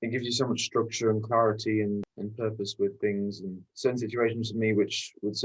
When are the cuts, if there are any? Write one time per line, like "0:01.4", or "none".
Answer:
none